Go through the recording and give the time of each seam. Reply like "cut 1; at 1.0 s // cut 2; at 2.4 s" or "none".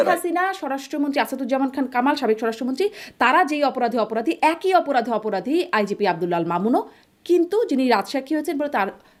none